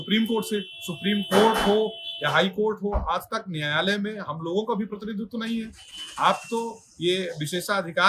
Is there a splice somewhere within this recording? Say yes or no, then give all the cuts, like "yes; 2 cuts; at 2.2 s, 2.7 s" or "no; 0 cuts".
no; 0 cuts